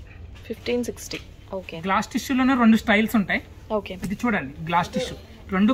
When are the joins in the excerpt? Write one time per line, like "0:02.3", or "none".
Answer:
none